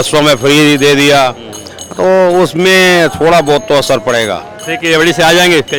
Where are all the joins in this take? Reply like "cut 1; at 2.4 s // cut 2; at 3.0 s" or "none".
none